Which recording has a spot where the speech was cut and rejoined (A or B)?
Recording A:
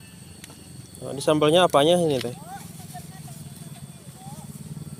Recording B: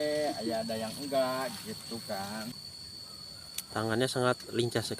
B